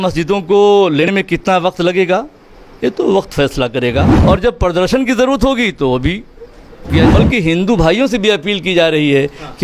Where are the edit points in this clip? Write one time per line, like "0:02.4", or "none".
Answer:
0:01.1
0:04.1
0:07.1